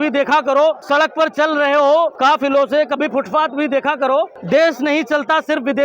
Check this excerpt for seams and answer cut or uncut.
cut